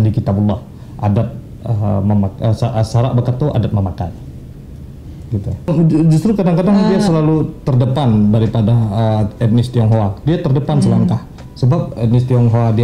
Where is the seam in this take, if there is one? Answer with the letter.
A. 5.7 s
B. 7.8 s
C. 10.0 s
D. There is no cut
A